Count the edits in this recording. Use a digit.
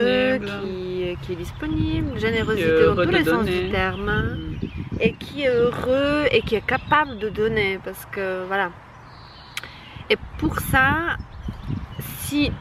0